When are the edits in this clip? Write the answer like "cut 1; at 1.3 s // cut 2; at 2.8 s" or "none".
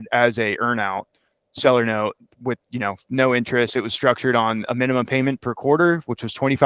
none